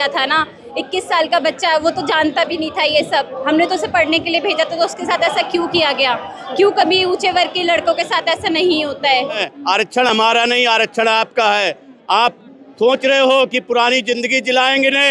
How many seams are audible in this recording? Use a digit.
1